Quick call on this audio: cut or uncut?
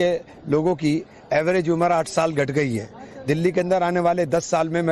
uncut